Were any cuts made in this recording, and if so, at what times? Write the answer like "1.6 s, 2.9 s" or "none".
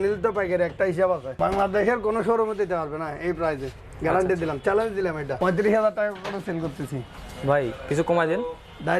1.3 s, 5.3 s